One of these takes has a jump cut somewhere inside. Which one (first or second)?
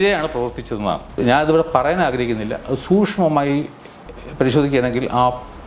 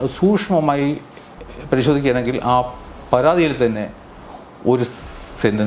first